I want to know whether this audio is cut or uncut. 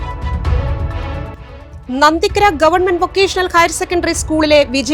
uncut